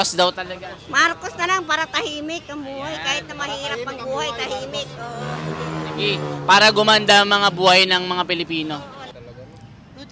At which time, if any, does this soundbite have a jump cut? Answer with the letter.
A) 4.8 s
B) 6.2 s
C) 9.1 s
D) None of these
C